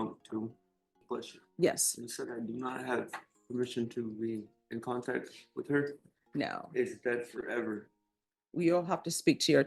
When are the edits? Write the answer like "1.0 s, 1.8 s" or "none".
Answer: 1.0 s